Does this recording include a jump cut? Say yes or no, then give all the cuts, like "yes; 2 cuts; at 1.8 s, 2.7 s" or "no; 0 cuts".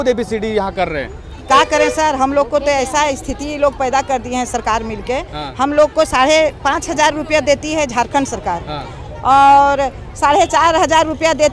no; 0 cuts